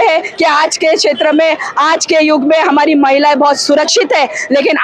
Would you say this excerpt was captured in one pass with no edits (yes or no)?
yes